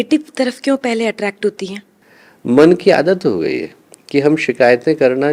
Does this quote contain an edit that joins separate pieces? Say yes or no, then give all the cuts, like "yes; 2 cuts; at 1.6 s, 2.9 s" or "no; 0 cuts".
no; 0 cuts